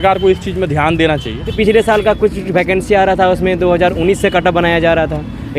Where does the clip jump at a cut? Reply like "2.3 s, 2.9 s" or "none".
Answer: 1.5 s